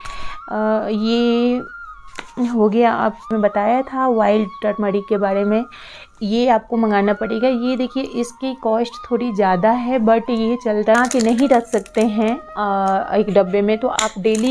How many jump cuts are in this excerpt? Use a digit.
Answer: 2